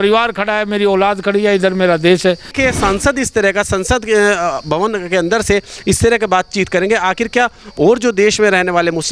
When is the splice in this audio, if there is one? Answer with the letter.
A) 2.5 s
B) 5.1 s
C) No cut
A